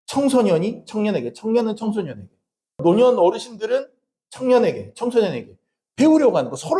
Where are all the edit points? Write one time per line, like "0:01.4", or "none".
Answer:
0:02.8